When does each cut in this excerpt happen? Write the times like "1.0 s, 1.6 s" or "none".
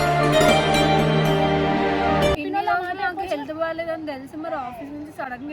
2.4 s